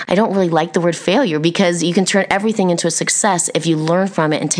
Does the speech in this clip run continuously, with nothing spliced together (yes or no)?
yes